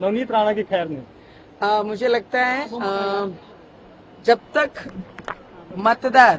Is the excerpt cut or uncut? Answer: uncut